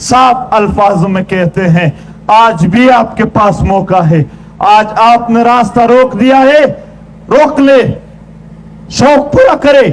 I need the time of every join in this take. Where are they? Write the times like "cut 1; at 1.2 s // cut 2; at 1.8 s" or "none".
none

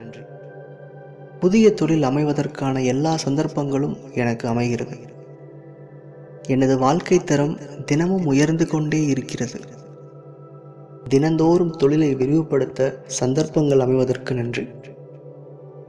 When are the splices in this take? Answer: none

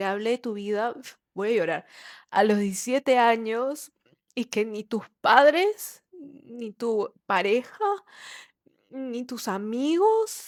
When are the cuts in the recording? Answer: none

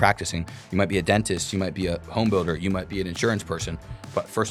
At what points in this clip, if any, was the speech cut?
none

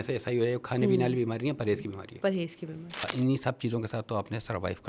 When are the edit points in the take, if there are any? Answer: cut 1; at 3.1 s

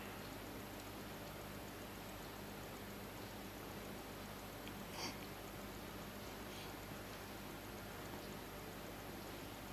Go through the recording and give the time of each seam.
none

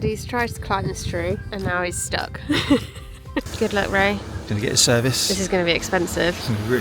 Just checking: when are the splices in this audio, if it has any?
cut 1; at 1.4 s // cut 2; at 3.5 s

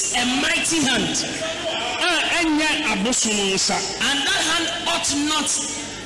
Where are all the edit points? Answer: none

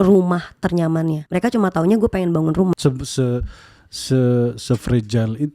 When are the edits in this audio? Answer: cut 1; at 1.2 s // cut 2; at 2.7 s

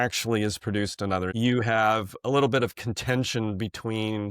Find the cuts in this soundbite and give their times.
cut 1; at 1.3 s

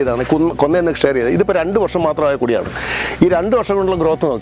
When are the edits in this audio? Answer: none

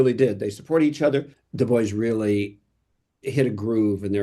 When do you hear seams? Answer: cut 1; at 1.4 s

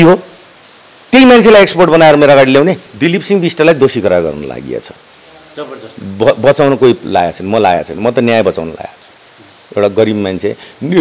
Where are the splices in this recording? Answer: cut 1; at 2.9 s

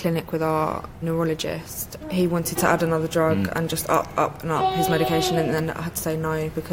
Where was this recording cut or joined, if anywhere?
cut 1; at 1.0 s

